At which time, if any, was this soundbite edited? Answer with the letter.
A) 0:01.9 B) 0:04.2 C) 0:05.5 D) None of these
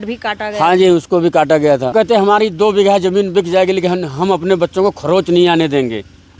A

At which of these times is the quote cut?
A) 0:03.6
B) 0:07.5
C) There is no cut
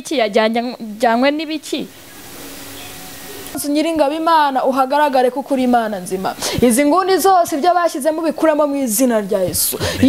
A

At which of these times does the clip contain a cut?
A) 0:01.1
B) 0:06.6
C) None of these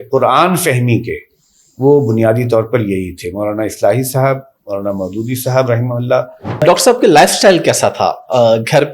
B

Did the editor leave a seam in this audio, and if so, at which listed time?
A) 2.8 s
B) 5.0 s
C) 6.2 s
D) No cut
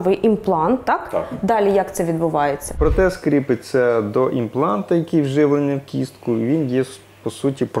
A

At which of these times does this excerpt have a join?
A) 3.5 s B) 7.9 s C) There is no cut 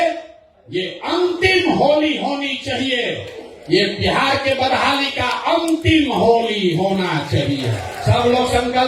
B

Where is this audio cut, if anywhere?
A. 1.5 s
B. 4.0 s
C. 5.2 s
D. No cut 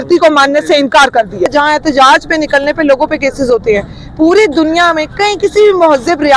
A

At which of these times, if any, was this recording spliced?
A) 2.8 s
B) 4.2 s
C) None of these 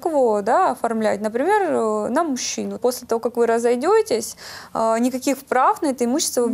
A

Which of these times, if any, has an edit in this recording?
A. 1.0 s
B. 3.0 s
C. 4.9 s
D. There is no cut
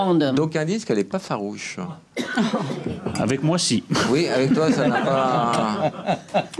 D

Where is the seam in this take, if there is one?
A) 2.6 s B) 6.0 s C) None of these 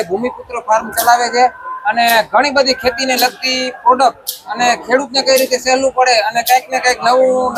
C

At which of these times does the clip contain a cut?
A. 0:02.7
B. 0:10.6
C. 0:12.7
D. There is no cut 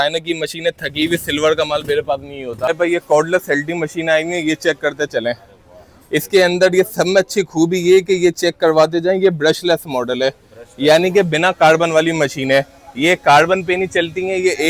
A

